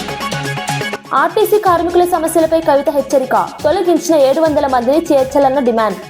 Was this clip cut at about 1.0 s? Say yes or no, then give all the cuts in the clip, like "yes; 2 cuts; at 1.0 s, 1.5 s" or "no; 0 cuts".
yes; 1 cut; at 1.0 s